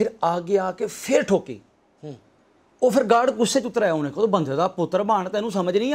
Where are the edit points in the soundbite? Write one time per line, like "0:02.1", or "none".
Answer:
none